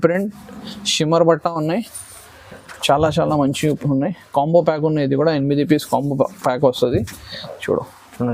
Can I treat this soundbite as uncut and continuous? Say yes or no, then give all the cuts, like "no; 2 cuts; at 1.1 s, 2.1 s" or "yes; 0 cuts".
yes; 0 cuts